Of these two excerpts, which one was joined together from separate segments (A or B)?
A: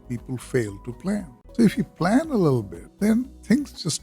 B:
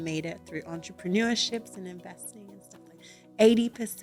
A